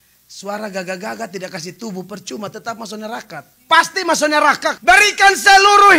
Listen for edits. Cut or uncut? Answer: cut